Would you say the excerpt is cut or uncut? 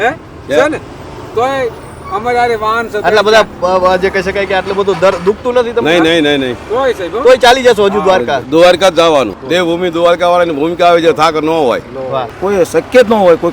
cut